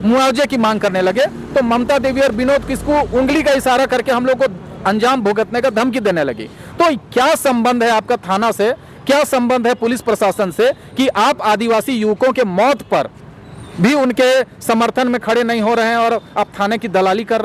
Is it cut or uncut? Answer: uncut